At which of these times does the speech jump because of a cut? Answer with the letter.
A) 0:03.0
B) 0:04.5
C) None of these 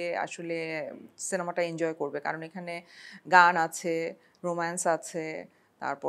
C